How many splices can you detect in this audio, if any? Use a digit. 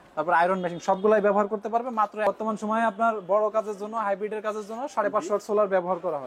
1